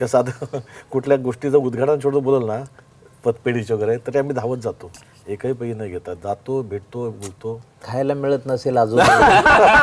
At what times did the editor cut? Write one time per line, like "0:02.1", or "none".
0:07.9